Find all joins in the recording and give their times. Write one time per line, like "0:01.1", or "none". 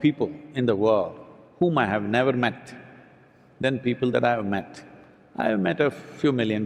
none

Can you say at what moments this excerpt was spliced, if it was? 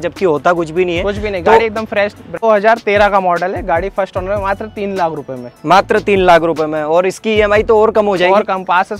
0:02.4

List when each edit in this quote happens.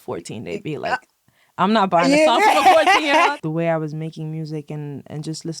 0:03.3

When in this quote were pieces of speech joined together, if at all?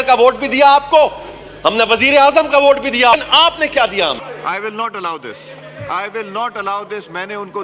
0:03.1

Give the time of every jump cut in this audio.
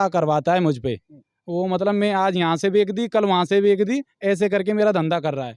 none

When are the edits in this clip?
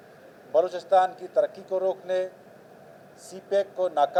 none

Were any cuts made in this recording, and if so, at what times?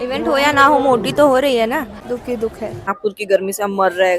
0:01.9
0:02.9

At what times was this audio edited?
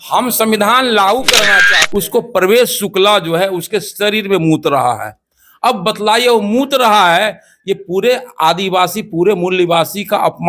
0:01.6

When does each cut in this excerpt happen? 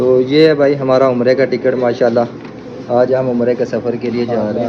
none

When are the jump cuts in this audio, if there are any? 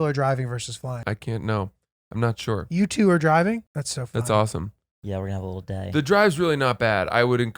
0:01.0
0:03.8

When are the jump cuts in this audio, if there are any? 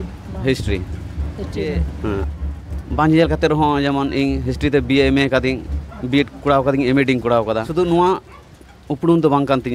0:02.2
0:07.7

